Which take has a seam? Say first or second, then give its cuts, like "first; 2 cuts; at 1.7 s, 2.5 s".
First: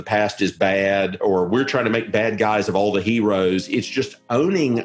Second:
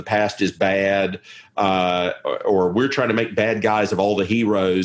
first; 1 cut; at 1.2 s